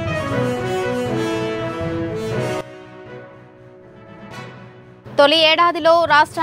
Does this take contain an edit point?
yes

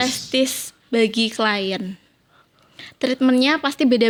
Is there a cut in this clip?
no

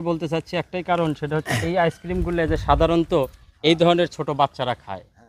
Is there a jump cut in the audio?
no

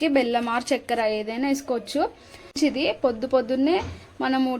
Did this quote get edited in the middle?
yes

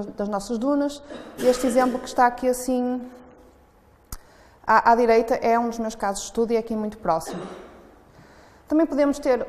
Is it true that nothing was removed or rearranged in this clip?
yes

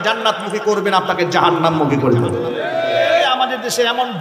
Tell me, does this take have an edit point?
yes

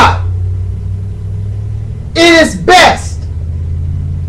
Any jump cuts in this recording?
no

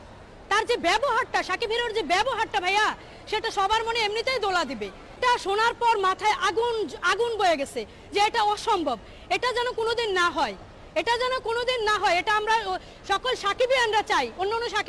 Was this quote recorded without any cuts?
yes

